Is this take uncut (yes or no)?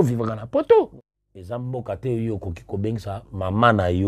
no